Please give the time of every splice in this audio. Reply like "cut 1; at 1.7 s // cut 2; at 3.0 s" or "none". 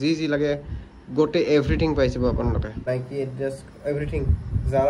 cut 1; at 2.8 s